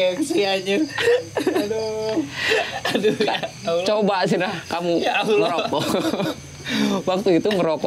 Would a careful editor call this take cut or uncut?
uncut